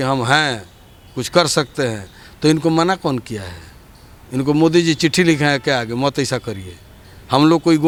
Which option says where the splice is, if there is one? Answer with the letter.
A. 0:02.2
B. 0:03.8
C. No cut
C